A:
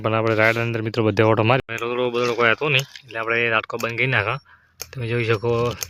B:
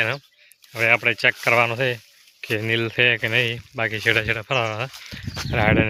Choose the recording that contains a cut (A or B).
A